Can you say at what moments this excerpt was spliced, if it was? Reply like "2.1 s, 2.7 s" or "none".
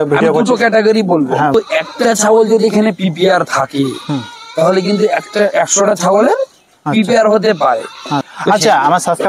1.5 s, 8.2 s